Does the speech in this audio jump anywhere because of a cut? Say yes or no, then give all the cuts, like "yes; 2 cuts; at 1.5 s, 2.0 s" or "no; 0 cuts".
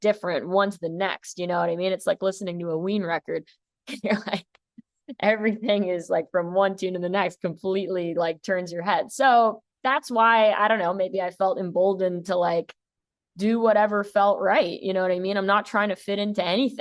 no; 0 cuts